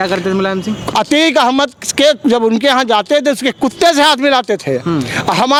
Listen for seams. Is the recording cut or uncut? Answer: uncut